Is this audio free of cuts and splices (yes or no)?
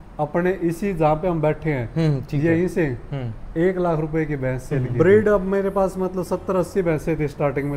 no